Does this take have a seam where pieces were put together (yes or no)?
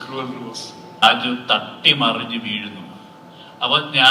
yes